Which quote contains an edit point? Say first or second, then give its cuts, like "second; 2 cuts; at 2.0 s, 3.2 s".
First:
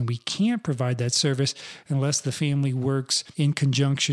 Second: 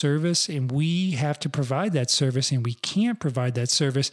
first; 1 cut; at 3.2 s